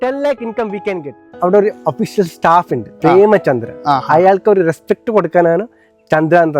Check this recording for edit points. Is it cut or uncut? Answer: cut